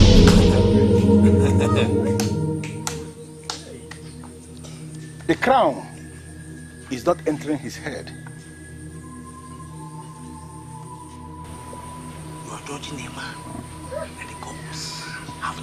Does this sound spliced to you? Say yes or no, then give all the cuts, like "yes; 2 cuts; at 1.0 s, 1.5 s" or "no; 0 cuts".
no; 0 cuts